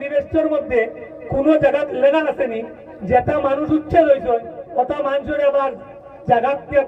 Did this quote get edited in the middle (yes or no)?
no